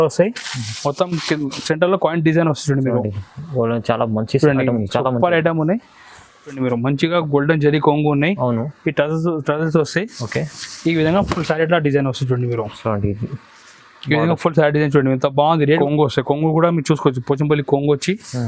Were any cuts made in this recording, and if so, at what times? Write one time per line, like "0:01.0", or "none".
0:06.6
0:15.8